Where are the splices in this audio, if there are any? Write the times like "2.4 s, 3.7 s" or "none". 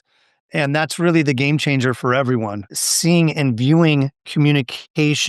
2.4 s